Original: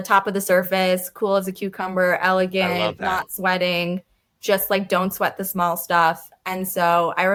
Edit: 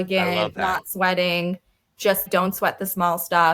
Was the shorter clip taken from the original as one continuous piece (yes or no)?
no